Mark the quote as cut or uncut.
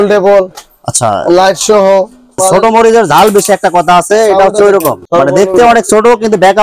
cut